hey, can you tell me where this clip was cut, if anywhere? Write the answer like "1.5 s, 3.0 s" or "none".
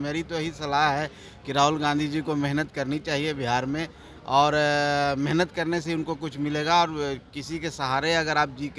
none